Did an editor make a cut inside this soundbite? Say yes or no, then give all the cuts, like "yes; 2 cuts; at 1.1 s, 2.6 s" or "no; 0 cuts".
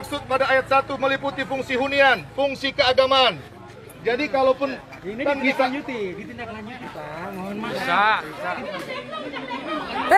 yes; 1 cut; at 8.6 s